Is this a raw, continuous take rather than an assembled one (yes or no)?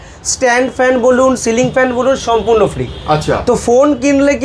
yes